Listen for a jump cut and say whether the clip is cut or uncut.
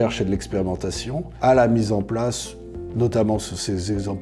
uncut